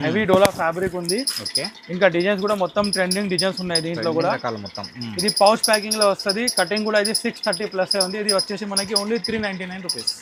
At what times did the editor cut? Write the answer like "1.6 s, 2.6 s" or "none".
none